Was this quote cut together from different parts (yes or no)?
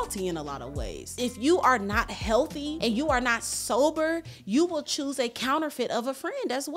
yes